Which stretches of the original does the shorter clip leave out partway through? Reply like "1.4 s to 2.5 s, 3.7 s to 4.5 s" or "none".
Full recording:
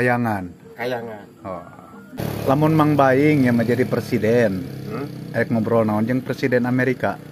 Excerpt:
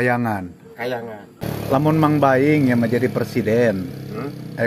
1.2 s to 2.0 s